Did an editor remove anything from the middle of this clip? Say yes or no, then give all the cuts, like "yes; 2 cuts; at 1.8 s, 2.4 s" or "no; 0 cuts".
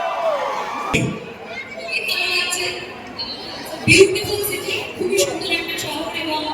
yes; 1 cut; at 1.0 s